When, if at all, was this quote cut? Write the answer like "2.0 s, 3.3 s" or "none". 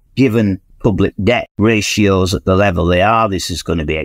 1.5 s